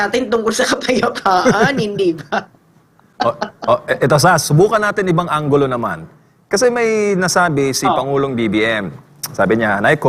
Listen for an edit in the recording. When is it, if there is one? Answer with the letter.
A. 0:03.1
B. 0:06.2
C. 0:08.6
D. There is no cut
D